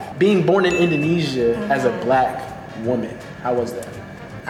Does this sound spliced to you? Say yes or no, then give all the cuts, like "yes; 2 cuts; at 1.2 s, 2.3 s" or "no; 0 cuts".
no; 0 cuts